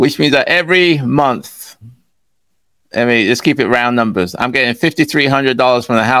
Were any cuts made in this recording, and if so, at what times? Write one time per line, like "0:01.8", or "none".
none